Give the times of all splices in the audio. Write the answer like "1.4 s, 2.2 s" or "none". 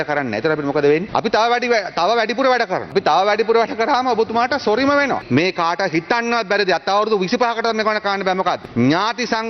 1.1 s, 2.9 s, 5.2 s, 8.6 s